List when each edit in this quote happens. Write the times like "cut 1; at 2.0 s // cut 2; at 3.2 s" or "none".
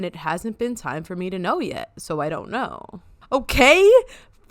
cut 1; at 2.9 s